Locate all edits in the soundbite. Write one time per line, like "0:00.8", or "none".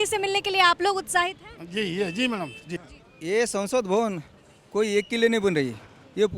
0:02.6